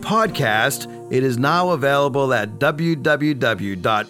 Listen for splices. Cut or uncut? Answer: cut